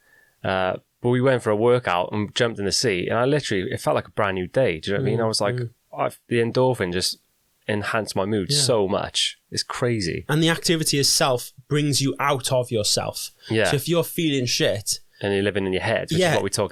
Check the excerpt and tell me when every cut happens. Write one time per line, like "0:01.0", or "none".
none